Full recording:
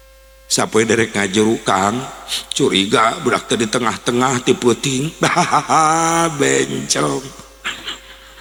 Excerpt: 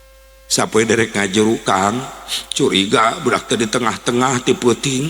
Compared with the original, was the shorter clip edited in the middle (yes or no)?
no